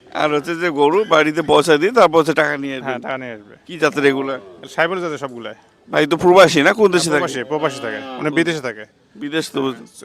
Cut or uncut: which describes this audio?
uncut